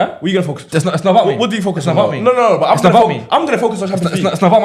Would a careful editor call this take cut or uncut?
uncut